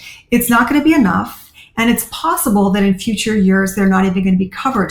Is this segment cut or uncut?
uncut